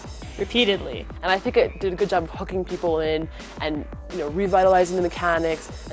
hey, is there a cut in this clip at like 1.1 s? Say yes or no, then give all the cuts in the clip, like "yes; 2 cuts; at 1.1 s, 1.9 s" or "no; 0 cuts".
yes; 1 cut; at 1.1 s